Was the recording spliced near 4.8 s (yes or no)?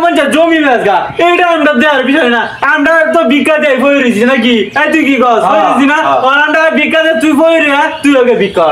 no